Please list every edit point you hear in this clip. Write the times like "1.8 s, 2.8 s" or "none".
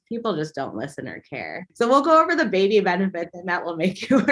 1.5 s